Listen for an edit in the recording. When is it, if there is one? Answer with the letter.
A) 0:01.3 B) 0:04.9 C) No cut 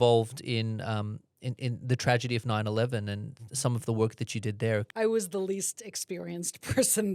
B